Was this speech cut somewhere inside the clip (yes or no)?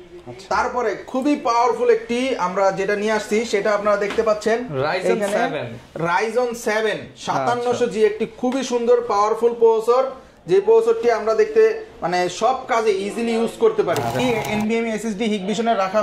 yes